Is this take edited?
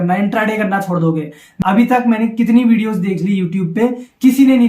yes; 1 cut; at 1.5 s

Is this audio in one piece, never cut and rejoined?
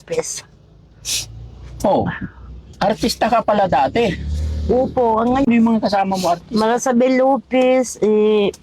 no; 1 cut; at 5.5 s

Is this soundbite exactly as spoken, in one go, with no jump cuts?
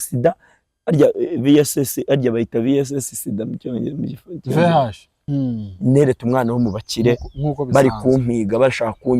no; 1 cut; at 5.2 s

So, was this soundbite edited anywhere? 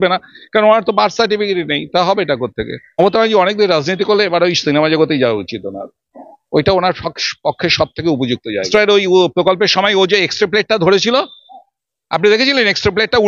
yes; 2 cuts; at 3.0 s, 8.6 s

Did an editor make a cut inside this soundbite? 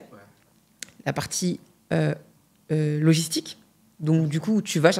no; 0 cuts

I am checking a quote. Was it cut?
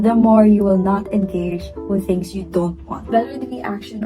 yes; 1 cut; at 3.1 s

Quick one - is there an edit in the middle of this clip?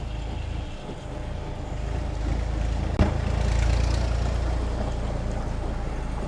no; 0 cuts

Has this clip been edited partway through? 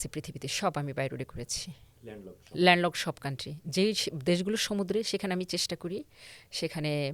no; 0 cuts

